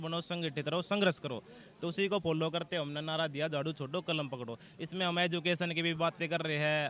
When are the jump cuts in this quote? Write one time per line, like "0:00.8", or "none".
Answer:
none

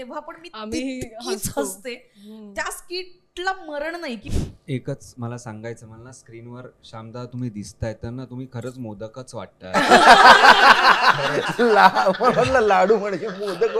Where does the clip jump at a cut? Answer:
0:04.3

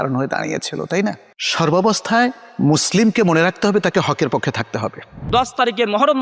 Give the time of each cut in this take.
none

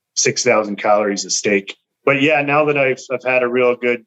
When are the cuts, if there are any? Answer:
0:01.9

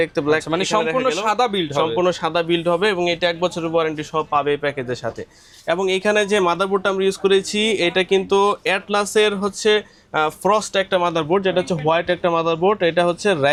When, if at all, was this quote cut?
none

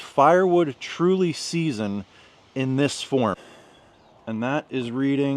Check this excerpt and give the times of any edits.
0:03.4

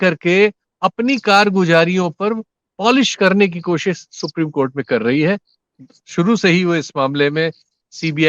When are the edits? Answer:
0:05.6

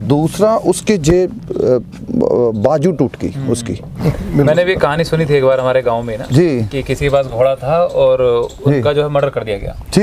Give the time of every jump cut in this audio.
0:03.9

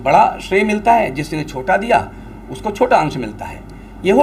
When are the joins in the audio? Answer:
none

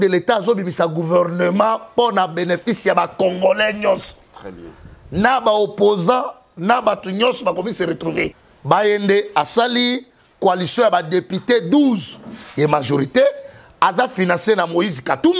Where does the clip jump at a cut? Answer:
0:08.3

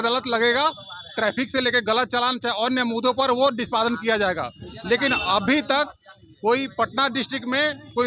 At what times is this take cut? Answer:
none

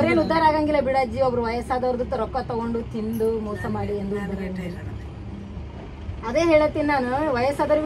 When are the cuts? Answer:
none

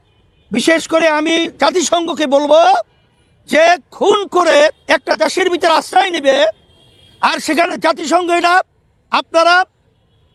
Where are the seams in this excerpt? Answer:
none

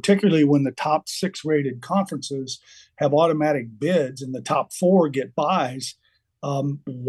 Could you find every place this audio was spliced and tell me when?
none

